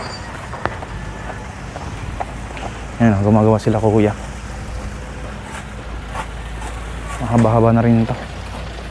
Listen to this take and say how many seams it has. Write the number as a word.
zero